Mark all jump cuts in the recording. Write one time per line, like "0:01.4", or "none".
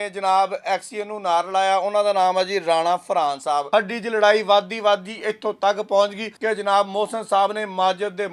0:03.6
0:06.3

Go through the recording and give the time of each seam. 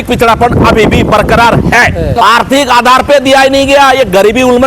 0:02.1

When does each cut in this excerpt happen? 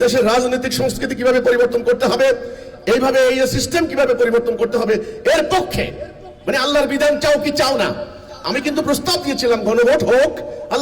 none

